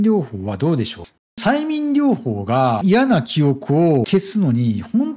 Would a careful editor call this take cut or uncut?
cut